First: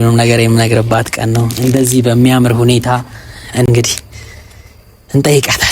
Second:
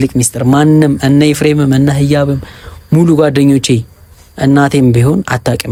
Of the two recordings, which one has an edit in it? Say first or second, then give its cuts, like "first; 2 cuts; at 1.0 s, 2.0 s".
first; 1 cut; at 3.7 s